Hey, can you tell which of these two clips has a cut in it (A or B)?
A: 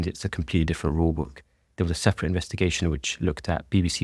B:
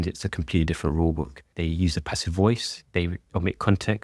B